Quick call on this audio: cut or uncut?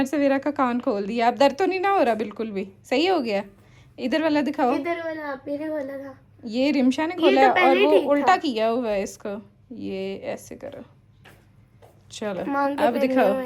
uncut